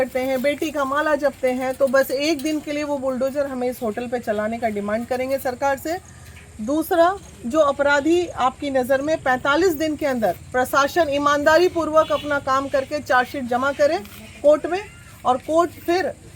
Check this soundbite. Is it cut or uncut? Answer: uncut